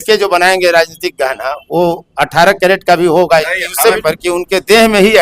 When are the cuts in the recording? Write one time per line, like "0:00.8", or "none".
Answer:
0:04.0